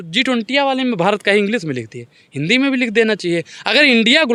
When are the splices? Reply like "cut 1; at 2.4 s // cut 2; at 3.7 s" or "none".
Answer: none